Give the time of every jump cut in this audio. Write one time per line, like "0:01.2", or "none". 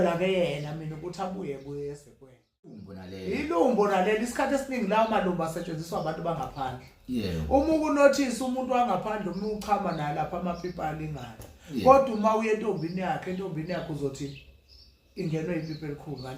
0:02.8